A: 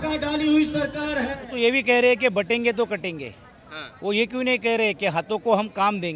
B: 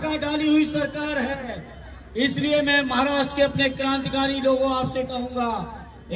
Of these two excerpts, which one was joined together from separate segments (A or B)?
A